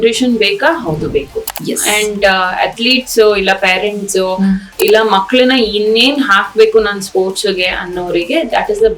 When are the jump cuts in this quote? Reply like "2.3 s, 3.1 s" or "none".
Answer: none

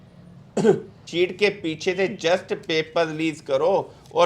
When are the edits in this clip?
1.0 s

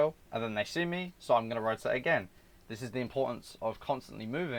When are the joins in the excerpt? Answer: none

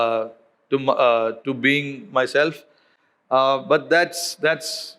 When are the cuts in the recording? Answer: none

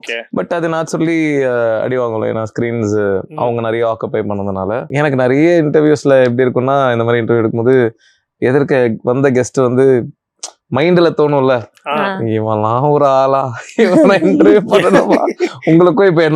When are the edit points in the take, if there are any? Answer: 4.9 s

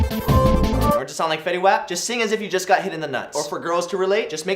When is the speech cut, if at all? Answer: 0.9 s

